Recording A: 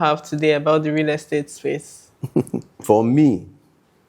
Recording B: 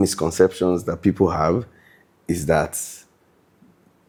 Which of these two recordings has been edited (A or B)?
A